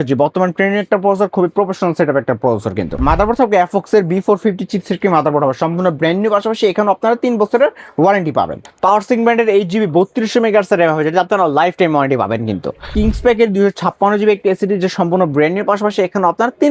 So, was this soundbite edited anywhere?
yes; 3 cuts; at 3.0 s, 8.6 s, 12.9 s

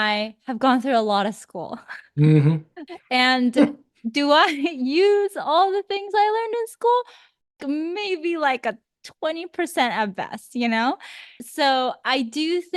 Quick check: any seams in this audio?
yes; 1 cut; at 11.4 s

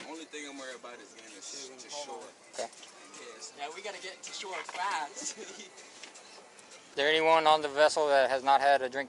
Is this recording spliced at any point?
yes; 1 cut; at 6.8 s

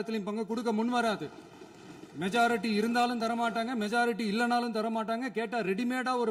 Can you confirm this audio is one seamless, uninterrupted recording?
yes; 0 cuts

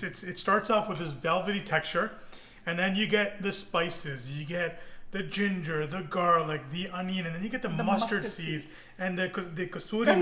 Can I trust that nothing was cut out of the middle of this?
yes; 0 cuts

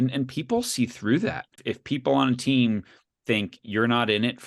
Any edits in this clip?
yes; 1 cut; at 1.6 s

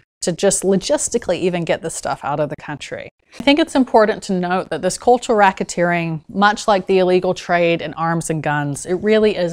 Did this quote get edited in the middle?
yes; 1 cut; at 3.4 s

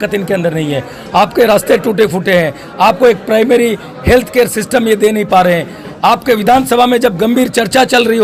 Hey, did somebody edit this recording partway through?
no; 0 cuts

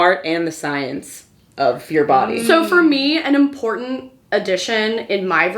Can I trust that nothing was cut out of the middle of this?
yes; 0 cuts

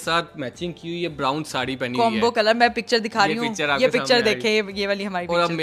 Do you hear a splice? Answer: no; 0 cuts

